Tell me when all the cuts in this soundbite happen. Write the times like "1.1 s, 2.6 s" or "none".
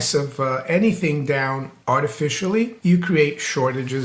1.7 s, 2.8 s